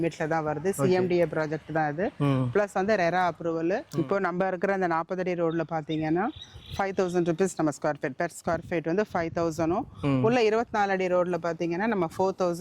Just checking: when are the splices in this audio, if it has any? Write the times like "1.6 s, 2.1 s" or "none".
3.9 s

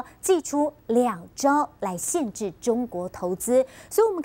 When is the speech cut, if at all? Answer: 0.9 s

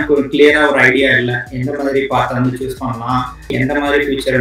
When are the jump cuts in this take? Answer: 3.5 s

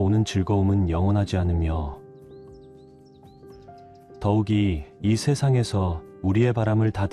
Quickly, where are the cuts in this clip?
none

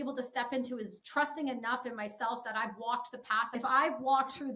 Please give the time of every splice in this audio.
1.0 s, 3.5 s

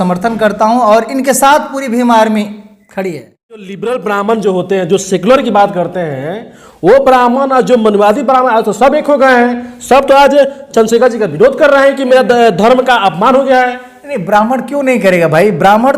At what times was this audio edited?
3.7 s

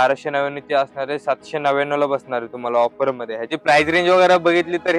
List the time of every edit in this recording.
3.5 s

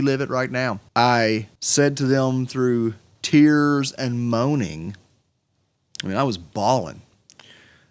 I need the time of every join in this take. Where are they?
0.8 s, 1.6 s, 3.1 s

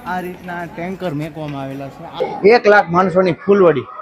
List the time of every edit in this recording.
2.4 s

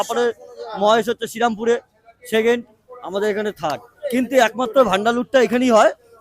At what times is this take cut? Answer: 3.9 s

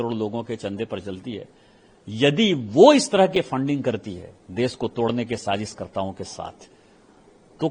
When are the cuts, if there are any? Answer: none

